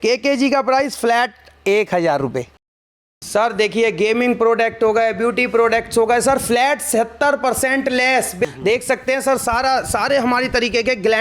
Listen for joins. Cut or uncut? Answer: cut